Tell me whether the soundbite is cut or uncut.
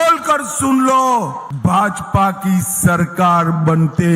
cut